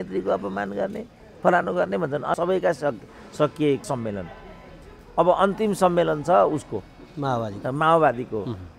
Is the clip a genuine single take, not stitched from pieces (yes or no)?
no